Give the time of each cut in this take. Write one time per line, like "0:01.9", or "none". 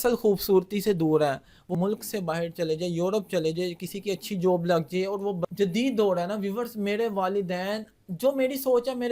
0:01.7
0:05.4